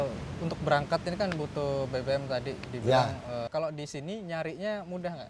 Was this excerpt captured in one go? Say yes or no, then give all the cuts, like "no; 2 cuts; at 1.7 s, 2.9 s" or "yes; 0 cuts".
no; 1 cut; at 3.5 s